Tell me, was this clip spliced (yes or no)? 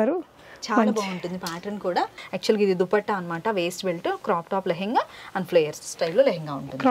yes